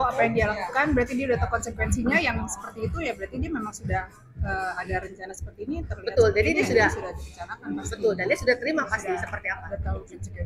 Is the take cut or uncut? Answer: uncut